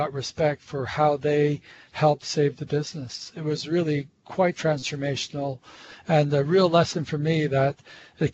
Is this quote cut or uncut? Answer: uncut